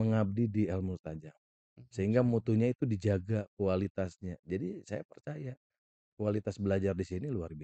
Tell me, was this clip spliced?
no; 0 cuts

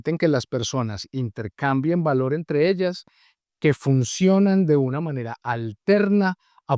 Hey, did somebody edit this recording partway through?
no; 0 cuts

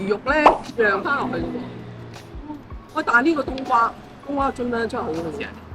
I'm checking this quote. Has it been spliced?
no; 0 cuts

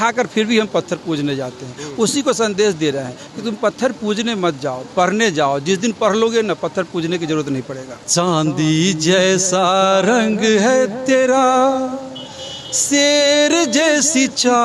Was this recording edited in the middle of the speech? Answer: yes; 1 cut; at 7.9 s

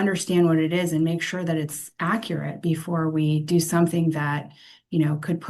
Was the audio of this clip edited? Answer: no; 0 cuts

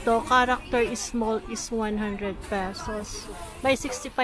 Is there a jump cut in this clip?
no; 0 cuts

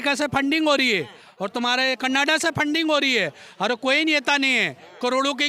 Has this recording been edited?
no; 0 cuts

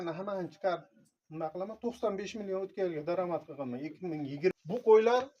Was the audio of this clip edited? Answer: yes; 1 cut; at 4.5 s

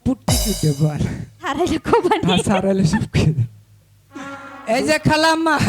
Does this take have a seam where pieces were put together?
yes; 1 cut; at 4.5 s

